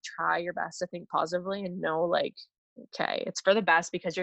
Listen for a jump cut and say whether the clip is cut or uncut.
uncut